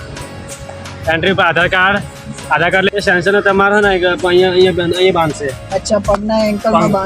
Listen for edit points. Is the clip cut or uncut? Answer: cut